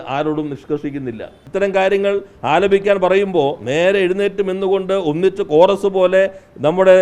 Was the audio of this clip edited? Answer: yes; 1 cut; at 1.4 s

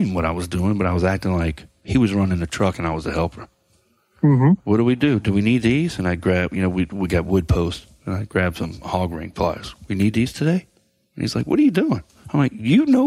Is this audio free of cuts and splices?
no; 1 cut; at 12.1 s

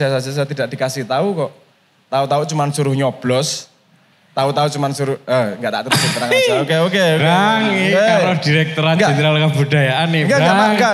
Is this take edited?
no; 0 cuts

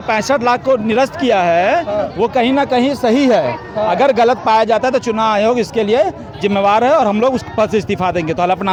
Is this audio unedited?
yes; 0 cuts

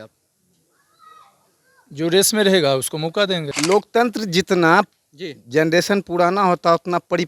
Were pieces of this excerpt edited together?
yes; 1 cut; at 3.5 s

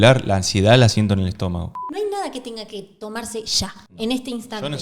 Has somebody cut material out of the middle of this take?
yes; 1 cut; at 1.8 s

